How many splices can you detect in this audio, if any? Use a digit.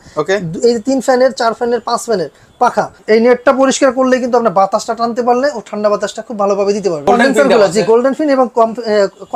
2